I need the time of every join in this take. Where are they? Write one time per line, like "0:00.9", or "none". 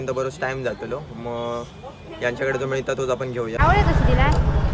0:03.6